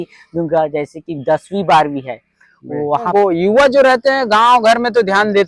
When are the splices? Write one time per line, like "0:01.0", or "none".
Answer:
0:03.1